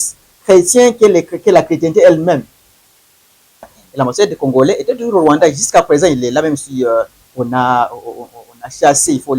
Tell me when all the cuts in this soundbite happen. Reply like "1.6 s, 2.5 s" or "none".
3.7 s